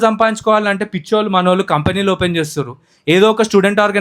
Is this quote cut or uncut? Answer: uncut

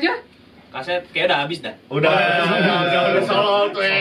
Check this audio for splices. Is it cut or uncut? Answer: uncut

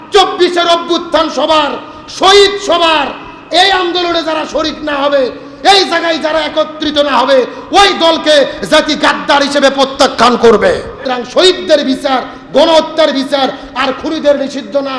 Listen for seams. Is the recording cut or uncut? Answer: cut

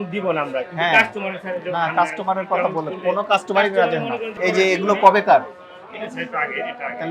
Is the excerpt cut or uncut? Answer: cut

